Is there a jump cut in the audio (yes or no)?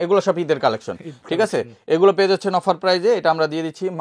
no